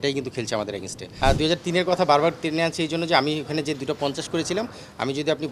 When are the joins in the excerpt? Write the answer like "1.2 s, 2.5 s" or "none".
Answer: 1.1 s